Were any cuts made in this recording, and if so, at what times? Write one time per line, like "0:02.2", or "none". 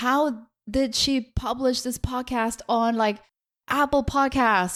none